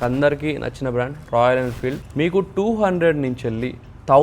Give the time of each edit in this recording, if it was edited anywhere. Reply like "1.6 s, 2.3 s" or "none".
2.0 s